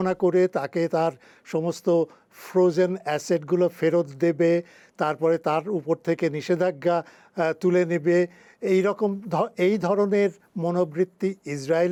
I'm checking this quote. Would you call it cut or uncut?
uncut